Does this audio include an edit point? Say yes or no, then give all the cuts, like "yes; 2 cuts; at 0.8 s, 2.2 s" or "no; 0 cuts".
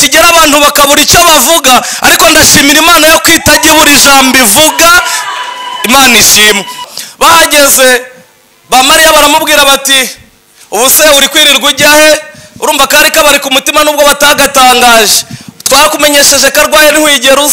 yes; 1 cut; at 6.8 s